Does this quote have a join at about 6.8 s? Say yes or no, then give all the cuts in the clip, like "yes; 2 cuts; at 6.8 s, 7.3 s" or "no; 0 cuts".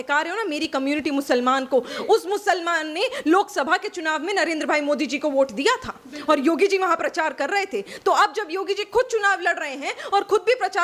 no; 0 cuts